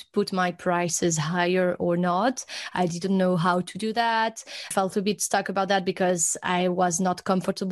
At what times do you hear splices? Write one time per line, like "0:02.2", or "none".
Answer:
0:04.6